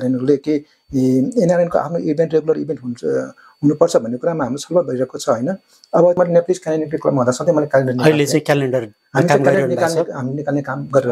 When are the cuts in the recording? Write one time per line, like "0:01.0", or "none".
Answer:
0:06.2